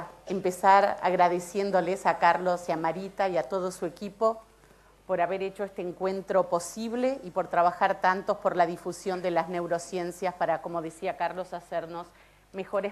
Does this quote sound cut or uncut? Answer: uncut